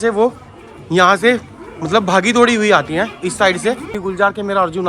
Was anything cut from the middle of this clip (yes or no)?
yes